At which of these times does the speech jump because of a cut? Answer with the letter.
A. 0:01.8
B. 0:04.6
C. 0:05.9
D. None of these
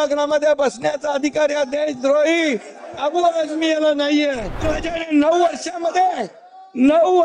B